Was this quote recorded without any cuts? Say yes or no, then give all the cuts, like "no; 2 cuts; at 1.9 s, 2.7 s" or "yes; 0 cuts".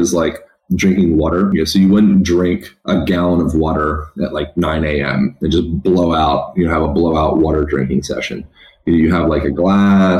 no; 2 cuts; at 1.5 s, 2.7 s